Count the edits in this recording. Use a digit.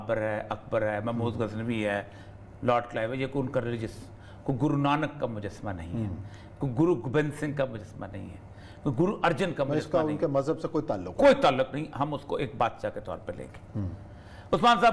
0